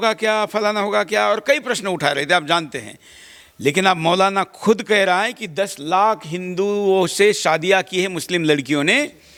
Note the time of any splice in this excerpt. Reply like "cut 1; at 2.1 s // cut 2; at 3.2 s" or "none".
none